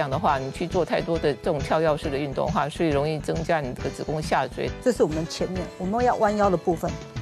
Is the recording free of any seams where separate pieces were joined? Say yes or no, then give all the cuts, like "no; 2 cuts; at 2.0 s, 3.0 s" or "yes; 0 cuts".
no; 1 cut; at 4.7 s